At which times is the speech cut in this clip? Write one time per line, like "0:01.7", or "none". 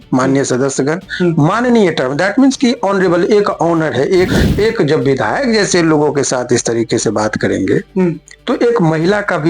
0:04.4

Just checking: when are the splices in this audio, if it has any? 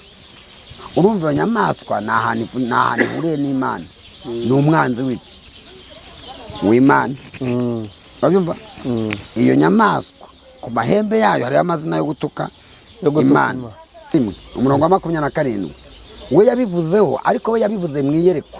0:14.1

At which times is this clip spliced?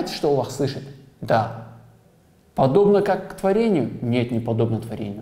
none

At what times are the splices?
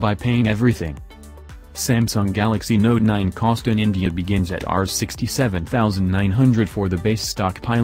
none

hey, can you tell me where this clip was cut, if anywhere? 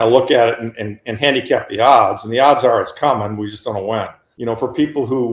0:04.2

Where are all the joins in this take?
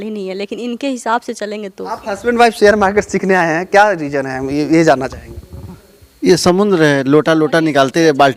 0:01.8

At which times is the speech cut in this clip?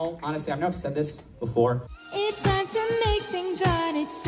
0:01.9

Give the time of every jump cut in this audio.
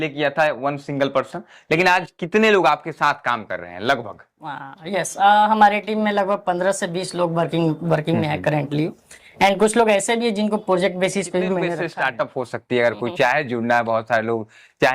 0:11.8

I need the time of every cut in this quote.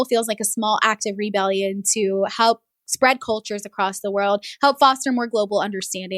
none

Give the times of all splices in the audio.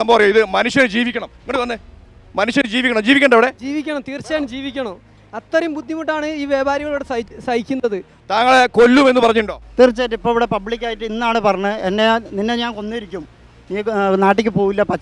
0:08.2

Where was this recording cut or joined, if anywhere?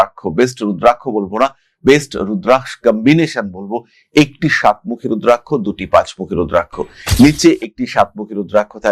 none

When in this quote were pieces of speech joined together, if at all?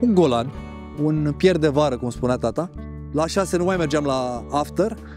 0:02.9

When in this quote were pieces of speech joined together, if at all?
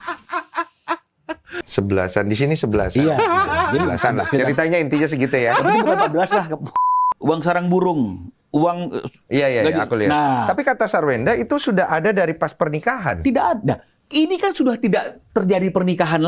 0:01.6
0:07.0

